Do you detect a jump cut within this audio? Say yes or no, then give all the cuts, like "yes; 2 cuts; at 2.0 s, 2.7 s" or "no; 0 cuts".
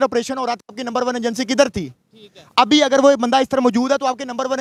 no; 0 cuts